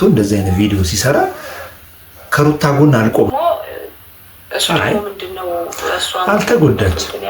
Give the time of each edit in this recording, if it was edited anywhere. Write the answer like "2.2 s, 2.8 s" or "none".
3.3 s